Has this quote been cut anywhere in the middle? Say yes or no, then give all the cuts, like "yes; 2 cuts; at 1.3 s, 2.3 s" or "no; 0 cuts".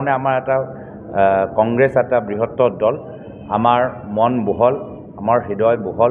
no; 0 cuts